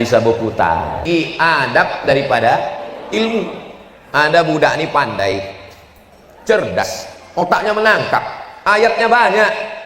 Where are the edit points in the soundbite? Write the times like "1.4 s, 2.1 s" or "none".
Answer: 1.0 s